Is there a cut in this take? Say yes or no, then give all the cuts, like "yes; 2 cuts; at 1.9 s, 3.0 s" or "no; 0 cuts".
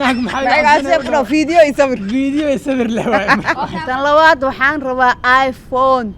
yes; 1 cut; at 3.8 s